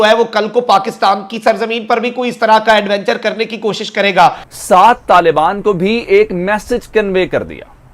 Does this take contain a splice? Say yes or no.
yes